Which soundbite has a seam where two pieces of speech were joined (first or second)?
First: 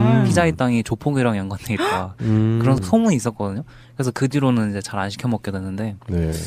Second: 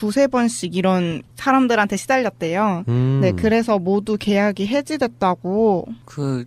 first